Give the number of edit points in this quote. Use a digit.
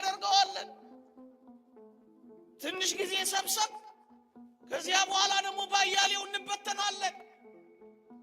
2